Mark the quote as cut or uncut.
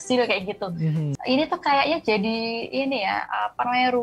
cut